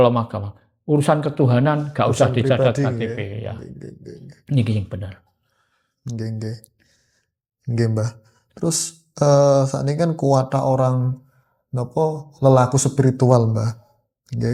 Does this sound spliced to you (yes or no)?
no